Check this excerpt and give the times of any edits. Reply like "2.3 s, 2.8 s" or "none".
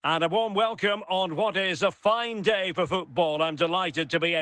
none